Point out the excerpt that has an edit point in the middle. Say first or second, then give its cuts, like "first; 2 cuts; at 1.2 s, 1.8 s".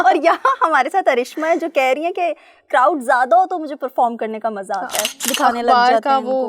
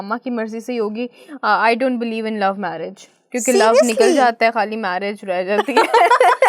first; 1 cut; at 5.2 s